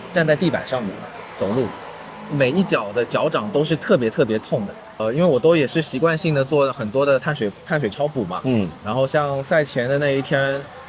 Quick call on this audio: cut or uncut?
cut